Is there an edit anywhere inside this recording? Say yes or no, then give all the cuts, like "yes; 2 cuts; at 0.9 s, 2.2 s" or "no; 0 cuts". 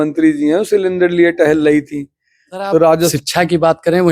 yes; 1 cut; at 3.1 s